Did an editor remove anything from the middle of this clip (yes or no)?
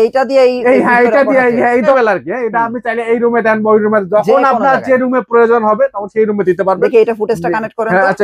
yes